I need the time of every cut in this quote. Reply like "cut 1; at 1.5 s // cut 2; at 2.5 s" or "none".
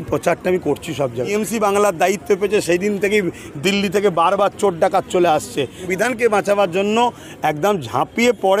cut 1; at 1.3 s // cut 2; at 5.8 s

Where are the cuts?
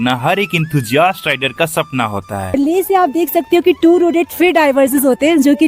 cut 1; at 2.5 s

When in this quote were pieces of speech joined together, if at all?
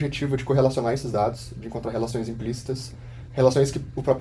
none

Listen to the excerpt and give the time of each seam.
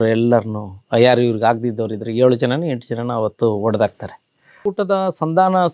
cut 1; at 4.6 s

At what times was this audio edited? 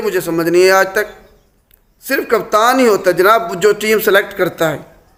none

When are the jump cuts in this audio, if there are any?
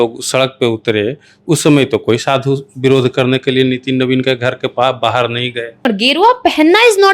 cut 1; at 6.0 s

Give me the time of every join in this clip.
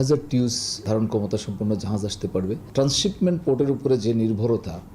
cut 1; at 0.9 s // cut 2; at 2.6 s

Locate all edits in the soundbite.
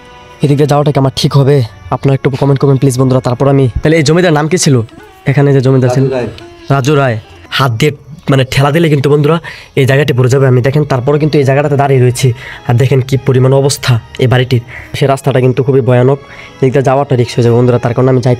cut 1; at 3.7 s // cut 2; at 7.4 s // cut 3; at 15.0 s

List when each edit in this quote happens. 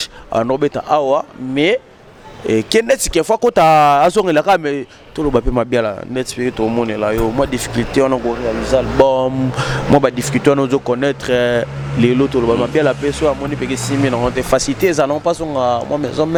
none

